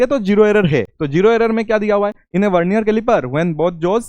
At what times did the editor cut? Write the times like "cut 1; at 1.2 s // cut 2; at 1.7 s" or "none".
cut 1; at 1.0 s // cut 2; at 2.2 s